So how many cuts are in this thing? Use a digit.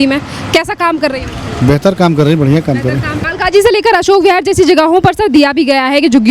1